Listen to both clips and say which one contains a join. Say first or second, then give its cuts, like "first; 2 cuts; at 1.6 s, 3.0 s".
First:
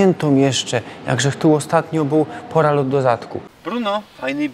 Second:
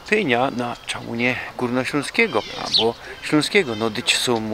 first; 1 cut; at 3.5 s